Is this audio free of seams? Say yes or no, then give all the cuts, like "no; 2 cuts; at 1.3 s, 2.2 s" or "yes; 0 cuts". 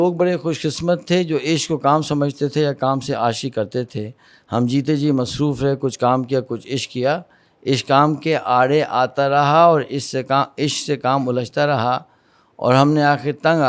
yes; 0 cuts